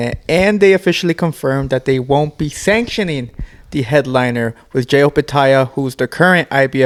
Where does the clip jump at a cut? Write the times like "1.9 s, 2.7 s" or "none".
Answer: none